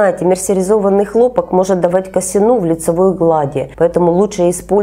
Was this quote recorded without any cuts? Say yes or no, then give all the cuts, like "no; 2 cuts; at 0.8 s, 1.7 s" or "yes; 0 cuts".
yes; 0 cuts